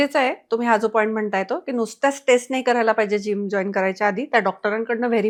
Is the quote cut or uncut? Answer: uncut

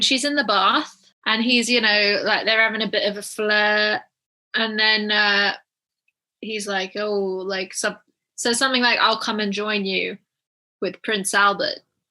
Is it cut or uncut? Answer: cut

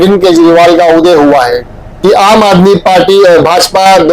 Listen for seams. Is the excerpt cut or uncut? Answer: cut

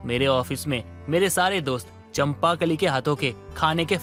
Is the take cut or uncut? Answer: uncut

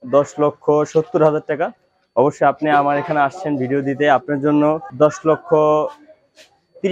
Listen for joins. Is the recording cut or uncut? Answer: cut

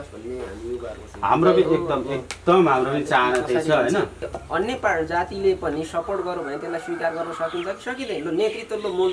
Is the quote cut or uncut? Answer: cut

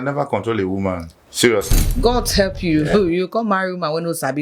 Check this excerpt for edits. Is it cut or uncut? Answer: cut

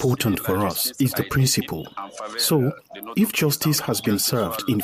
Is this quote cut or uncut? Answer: uncut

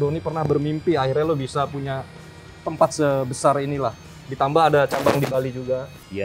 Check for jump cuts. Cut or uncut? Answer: uncut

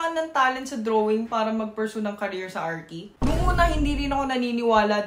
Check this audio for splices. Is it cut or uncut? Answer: uncut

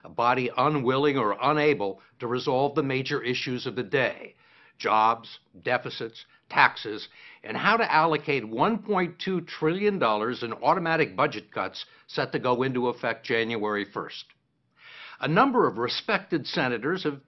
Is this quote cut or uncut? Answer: uncut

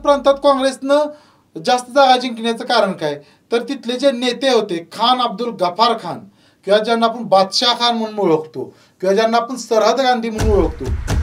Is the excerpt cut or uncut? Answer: uncut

